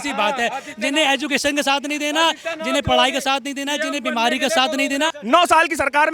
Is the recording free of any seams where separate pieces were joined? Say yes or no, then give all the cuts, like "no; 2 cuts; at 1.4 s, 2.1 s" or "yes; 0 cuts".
no; 1 cut; at 5.1 s